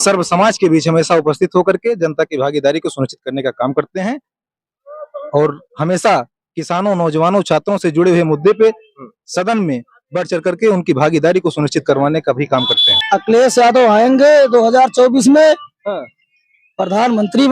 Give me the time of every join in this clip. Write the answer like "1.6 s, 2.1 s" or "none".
13.0 s